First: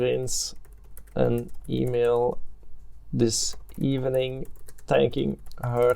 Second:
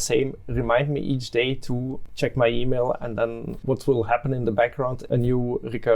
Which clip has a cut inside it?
second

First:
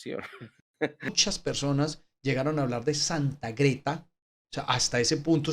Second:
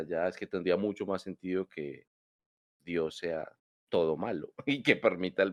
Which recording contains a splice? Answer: first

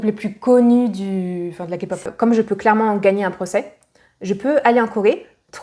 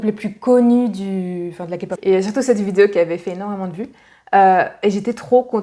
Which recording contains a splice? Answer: first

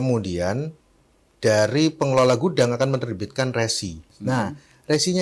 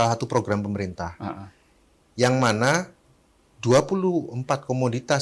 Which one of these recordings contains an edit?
first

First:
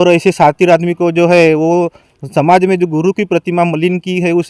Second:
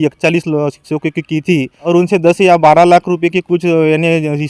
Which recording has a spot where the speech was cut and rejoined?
second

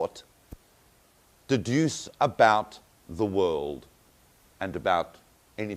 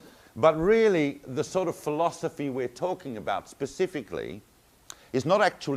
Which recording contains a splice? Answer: first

